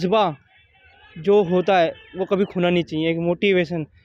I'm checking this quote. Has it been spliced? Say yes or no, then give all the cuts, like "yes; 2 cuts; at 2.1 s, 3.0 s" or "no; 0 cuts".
no; 0 cuts